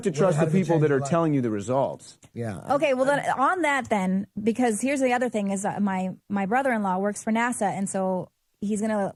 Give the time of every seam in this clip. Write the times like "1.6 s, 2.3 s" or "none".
none